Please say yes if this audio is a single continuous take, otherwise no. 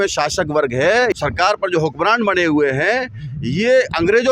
no